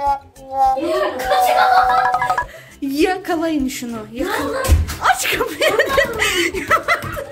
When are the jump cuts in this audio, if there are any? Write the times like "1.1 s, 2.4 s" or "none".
none